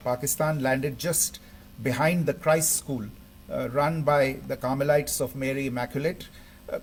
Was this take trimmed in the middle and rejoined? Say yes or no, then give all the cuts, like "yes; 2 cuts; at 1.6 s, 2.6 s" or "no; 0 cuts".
no; 0 cuts